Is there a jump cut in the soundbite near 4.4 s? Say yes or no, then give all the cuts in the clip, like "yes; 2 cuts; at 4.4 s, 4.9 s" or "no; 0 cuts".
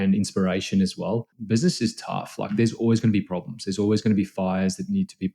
no; 1 cut; at 1.3 s